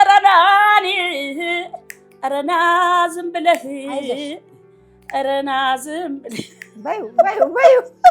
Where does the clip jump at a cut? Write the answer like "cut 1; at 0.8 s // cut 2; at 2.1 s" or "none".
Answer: none